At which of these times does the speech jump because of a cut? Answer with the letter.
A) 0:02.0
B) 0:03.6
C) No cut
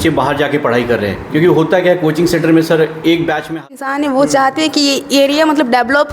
B